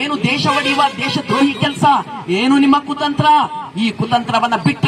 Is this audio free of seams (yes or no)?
yes